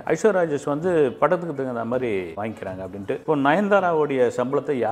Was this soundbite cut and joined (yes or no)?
no